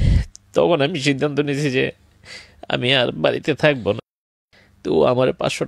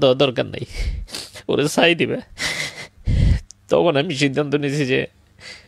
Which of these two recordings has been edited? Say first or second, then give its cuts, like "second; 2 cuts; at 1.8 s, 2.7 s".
first; 1 cut; at 4.1 s